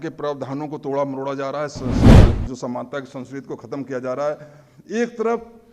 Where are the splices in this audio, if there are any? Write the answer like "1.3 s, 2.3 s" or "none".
1.8 s, 2.4 s